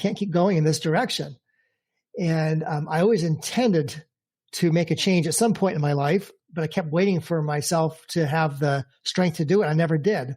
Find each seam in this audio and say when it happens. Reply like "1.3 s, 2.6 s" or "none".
6.4 s

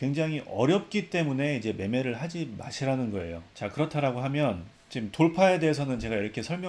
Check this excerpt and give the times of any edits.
3.5 s

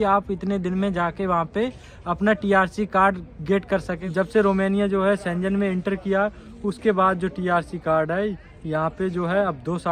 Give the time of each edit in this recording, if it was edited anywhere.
4.0 s

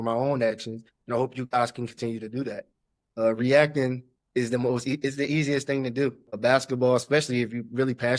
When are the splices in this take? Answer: 6.3 s

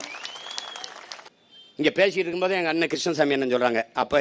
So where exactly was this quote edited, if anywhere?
1.3 s

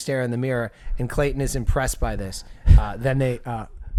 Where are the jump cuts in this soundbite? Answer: none

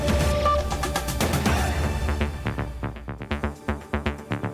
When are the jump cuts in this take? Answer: 3.2 s

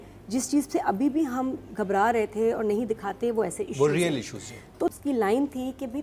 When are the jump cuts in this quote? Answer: 5.0 s

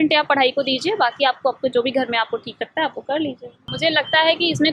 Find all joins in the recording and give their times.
3.7 s

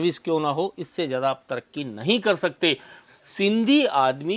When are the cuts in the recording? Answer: 3.0 s

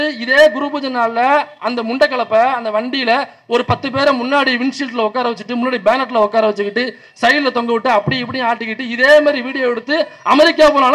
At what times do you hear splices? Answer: none

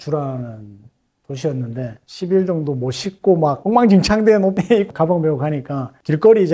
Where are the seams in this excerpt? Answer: 2.0 s

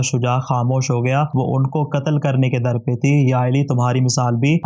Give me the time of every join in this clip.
1.3 s

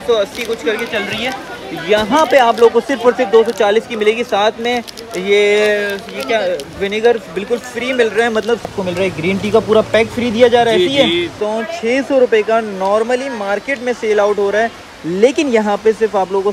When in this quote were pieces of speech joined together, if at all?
8.7 s, 11.4 s

